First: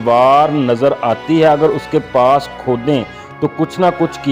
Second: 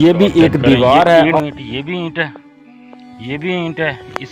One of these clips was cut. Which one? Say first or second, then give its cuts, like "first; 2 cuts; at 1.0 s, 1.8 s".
second; 1 cut; at 1.4 s